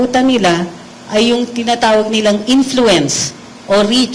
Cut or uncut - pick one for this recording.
uncut